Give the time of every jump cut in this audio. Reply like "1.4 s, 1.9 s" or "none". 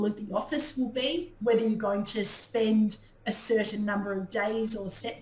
none